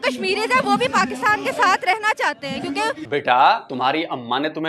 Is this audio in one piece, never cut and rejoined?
no; 2 cuts; at 3.0 s, 3.7 s

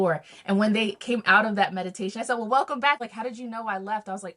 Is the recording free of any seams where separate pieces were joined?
no; 1 cut; at 3.0 s

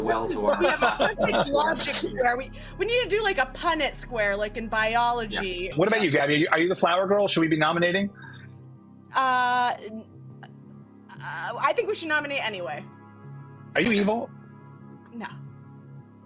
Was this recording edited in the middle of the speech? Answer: yes; 1 cut; at 5.7 s

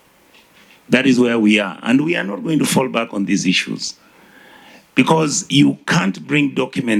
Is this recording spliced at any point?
no; 0 cuts

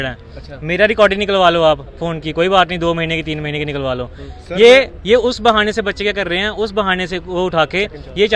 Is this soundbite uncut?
yes; 0 cuts

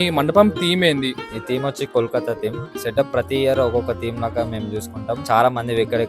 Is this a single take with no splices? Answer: no; 3 cuts; at 1.3 s, 2.7 s, 5.2 s

